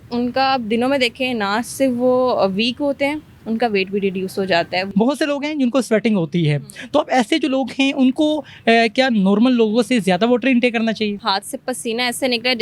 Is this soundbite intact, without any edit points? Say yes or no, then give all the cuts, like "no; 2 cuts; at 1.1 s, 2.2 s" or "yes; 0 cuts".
no; 2 cuts; at 4.9 s, 11.2 s